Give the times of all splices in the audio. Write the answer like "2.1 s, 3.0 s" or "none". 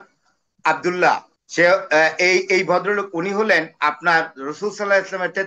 1.3 s